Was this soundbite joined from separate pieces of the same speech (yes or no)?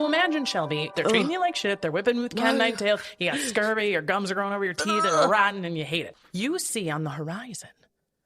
yes